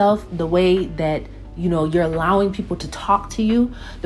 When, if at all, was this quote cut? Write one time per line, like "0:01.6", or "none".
none